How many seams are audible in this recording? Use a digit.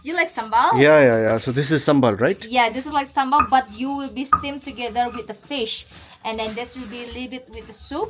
0